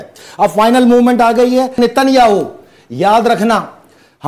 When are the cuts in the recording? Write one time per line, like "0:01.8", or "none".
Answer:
0:01.8